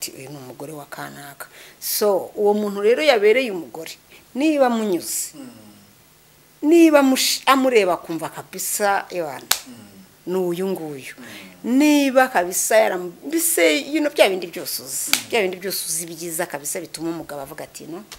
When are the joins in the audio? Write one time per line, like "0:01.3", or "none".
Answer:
none